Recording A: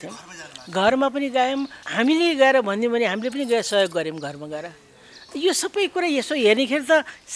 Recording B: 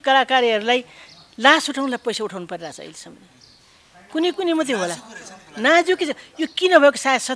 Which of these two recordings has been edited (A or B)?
A